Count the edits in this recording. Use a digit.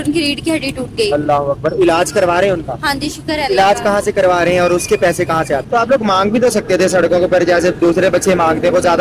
1